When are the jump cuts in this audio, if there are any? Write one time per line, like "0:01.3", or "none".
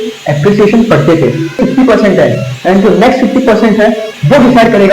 0:01.6